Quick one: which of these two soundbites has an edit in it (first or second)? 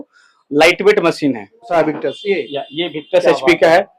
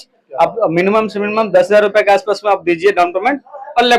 first